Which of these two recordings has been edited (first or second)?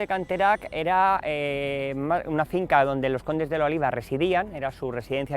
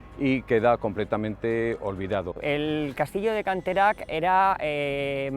second